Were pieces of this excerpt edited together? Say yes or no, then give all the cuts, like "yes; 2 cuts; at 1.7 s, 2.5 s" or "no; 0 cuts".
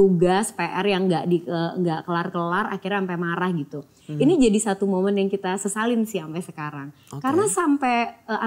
no; 0 cuts